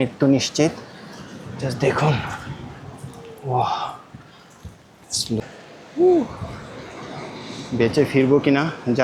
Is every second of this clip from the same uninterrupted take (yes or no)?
no